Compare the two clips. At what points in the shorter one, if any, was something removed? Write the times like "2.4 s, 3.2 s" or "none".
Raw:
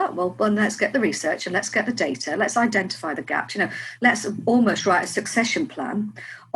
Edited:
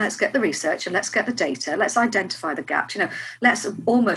none

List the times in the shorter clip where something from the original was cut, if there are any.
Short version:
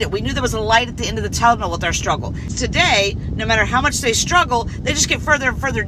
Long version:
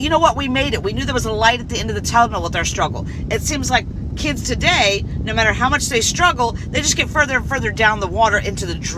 2.5 s

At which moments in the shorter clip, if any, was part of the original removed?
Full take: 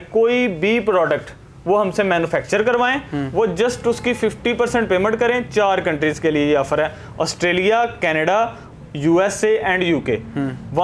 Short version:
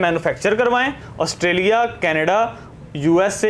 1.0 s

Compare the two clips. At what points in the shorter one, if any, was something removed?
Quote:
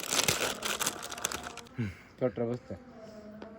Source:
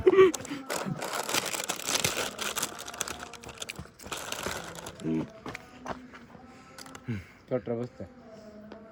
1.6 s

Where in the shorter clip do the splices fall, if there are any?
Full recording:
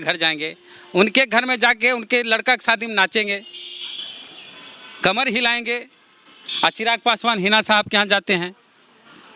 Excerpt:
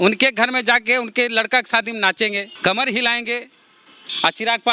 2.5 s

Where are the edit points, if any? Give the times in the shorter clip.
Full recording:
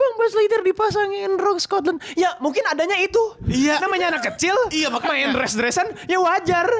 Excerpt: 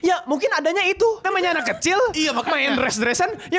1.2 s

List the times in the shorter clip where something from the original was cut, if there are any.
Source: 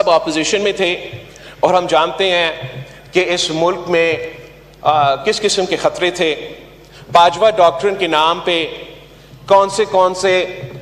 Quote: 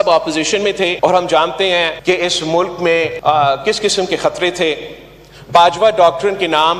0.9 s, 1.9 s, 3.1 s

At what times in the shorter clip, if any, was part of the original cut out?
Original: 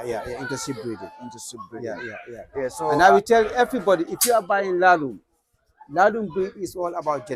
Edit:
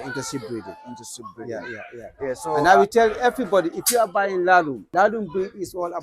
4.8 s

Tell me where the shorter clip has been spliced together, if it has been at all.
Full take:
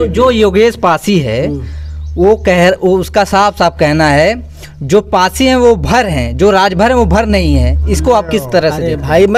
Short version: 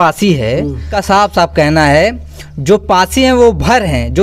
0.9 s

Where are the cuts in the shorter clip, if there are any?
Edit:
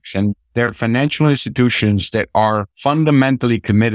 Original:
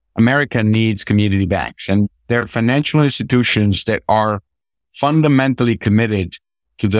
2.7 s

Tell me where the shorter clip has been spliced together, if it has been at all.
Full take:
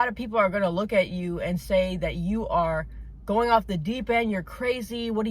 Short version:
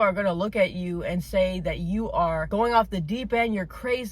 2.4 s

